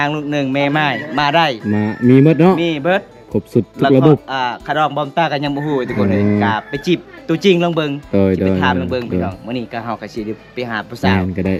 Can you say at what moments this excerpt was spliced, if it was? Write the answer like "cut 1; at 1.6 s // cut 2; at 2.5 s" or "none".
none